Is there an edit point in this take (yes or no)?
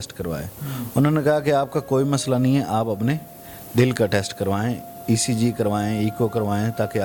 no